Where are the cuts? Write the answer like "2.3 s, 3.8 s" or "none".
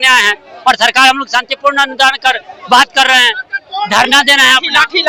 none